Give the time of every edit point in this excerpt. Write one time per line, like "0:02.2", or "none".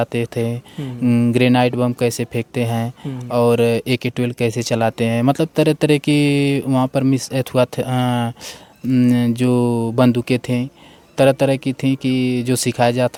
none

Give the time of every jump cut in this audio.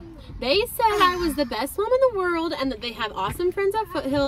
none

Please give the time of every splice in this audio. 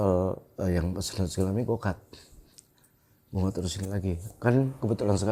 none

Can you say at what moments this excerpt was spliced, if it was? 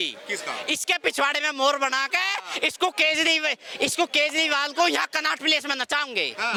none

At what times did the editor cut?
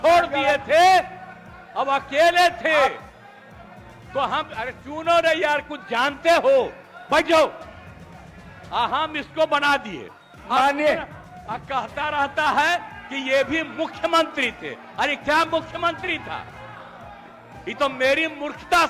0:10.3

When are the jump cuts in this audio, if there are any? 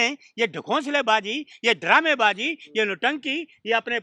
none

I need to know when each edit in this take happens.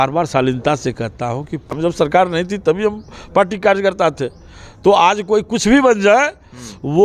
0:01.7

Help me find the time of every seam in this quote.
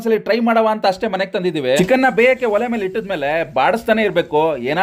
0:01.8

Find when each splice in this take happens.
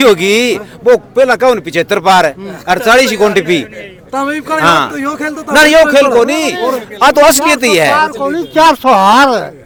none

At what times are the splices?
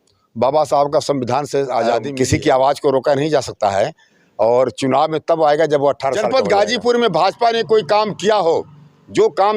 0:02.1
0:06.3

